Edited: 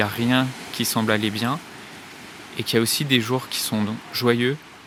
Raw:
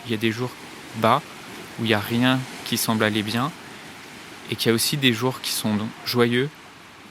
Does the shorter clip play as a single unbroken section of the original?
yes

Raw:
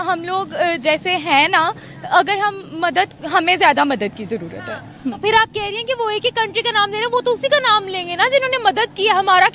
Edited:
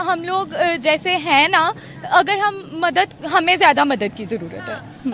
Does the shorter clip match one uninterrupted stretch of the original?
yes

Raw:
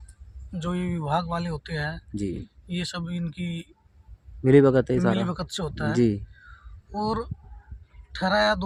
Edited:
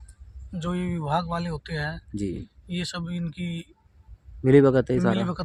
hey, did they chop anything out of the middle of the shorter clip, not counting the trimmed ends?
no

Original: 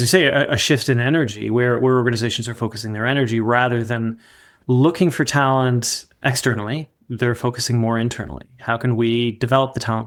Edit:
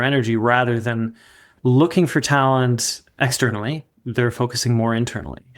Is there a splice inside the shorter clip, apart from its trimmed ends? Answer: no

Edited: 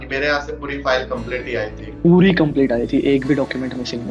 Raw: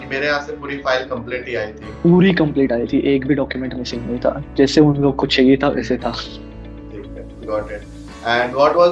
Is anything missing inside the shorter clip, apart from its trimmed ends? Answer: no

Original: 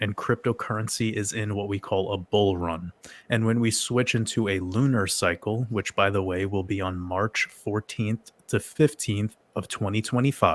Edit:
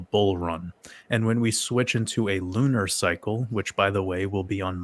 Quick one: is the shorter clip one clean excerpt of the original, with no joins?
yes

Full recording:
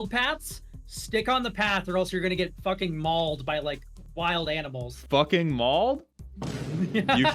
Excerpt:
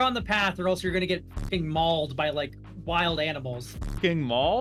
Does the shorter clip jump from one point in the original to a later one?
no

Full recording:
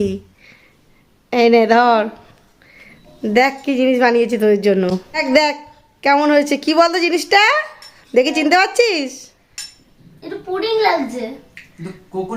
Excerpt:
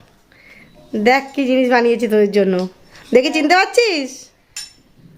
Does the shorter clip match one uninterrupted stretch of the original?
no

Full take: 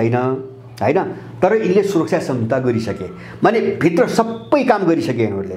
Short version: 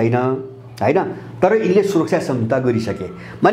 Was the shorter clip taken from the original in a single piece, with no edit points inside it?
yes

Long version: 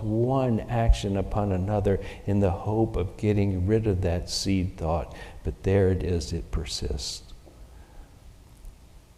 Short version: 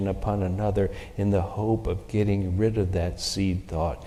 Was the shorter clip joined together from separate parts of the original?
no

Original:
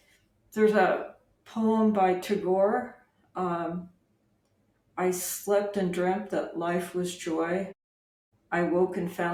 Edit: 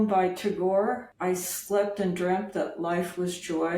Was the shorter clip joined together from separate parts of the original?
yes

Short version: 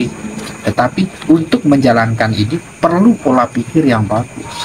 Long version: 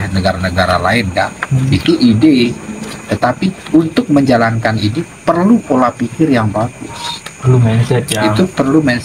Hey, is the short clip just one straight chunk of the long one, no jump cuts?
yes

